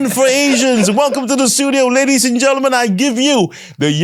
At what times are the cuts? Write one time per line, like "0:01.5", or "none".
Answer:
none